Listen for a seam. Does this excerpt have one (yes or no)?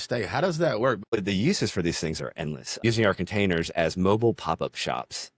yes